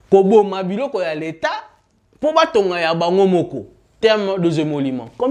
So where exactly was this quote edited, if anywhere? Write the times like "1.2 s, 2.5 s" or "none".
3.8 s